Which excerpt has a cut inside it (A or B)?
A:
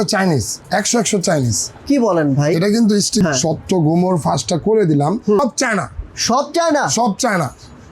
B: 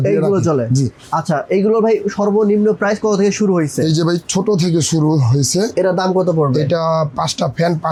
A